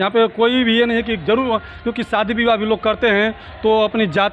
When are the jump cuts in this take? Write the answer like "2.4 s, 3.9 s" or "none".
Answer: none